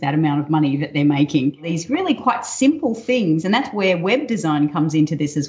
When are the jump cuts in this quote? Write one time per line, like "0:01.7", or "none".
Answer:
0:01.7